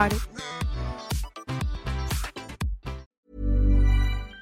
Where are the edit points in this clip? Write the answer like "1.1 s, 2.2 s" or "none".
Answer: 3.0 s